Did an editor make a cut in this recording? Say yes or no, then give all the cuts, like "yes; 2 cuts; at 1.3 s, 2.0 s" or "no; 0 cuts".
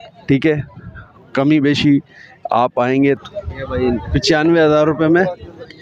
yes; 1 cut; at 3.2 s